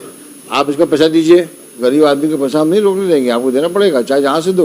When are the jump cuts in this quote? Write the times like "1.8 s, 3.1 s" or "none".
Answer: 1.8 s